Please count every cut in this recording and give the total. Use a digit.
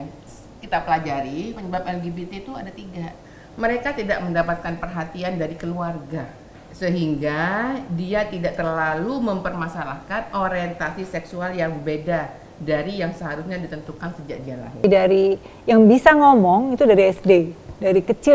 2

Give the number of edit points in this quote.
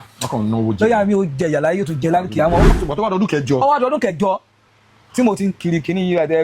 1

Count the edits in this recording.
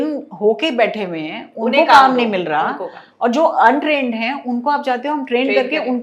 0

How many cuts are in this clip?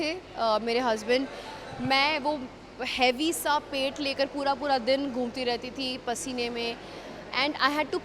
0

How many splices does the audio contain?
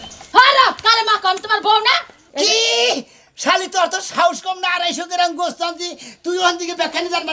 1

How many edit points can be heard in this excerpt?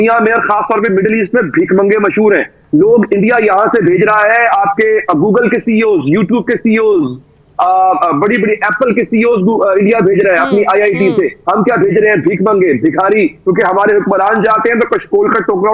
0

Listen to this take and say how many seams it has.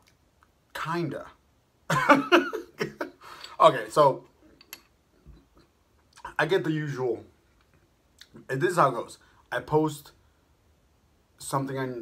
0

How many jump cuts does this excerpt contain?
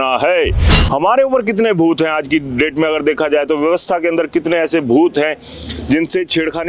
0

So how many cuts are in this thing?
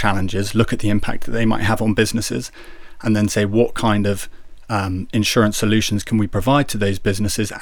0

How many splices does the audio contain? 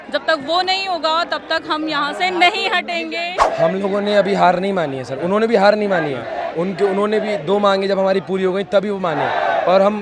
1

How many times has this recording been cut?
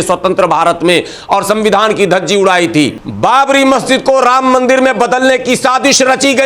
1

